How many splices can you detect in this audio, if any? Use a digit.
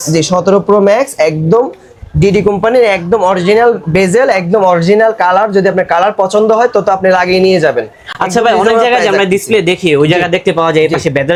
0